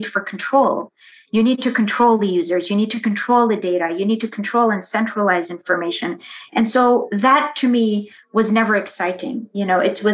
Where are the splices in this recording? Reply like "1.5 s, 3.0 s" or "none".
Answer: none